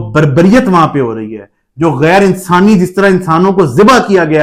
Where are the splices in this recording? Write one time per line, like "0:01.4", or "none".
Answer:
none